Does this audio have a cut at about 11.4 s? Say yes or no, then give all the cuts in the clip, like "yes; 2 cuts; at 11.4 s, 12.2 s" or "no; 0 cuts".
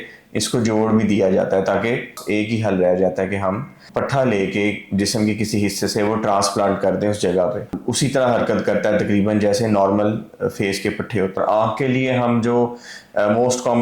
yes; 3 cuts; at 2.2 s, 7.7 s, 11.4 s